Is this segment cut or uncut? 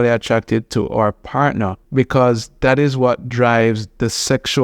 cut